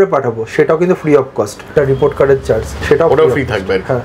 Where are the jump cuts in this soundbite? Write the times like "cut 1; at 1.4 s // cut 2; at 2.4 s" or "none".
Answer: cut 1; at 1.7 s // cut 2; at 2.7 s